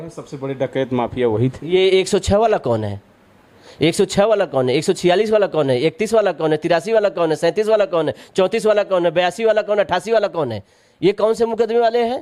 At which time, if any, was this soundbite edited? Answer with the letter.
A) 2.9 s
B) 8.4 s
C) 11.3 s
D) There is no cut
D